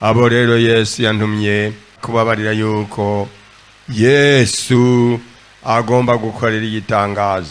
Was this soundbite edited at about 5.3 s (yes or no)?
no